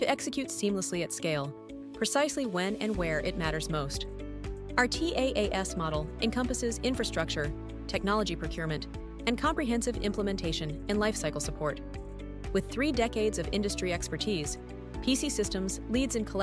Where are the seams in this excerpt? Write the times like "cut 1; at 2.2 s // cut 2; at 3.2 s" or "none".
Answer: none